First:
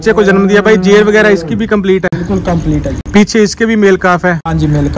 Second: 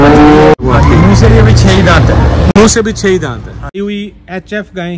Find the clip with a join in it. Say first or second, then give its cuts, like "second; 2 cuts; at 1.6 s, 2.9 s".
second; 1 cut; at 3.8 s